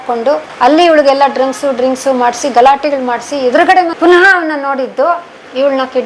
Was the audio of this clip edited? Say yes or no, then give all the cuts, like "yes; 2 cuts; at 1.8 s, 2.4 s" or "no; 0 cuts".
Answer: yes; 1 cut; at 3.9 s